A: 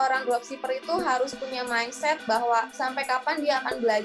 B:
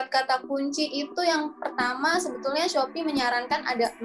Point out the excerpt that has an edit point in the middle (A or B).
A